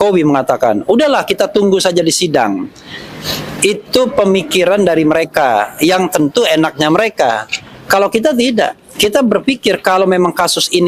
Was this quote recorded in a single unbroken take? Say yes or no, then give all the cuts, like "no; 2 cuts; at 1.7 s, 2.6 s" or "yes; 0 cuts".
yes; 0 cuts